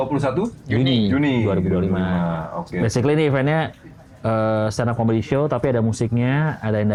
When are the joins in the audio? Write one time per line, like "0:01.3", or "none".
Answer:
none